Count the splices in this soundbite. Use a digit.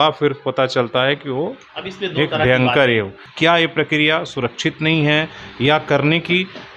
1